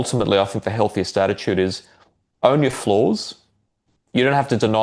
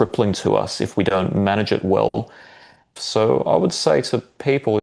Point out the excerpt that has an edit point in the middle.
second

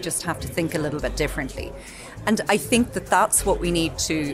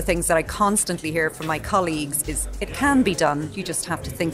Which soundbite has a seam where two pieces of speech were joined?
second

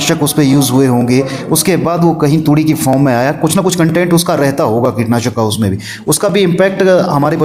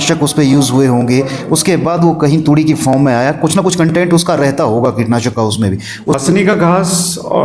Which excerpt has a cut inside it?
second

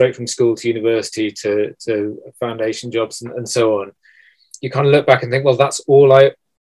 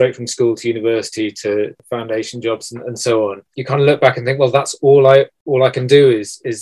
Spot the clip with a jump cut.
second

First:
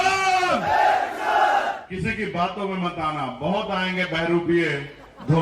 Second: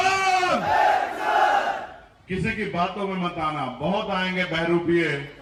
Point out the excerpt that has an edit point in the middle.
first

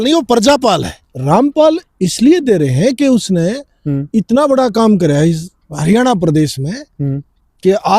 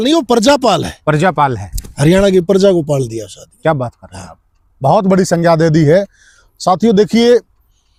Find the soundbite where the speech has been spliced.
first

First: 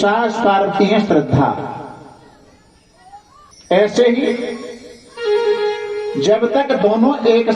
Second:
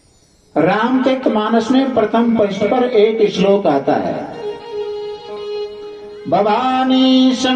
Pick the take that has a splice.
first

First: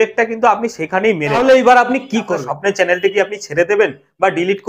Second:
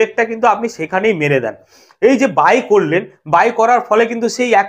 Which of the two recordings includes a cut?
first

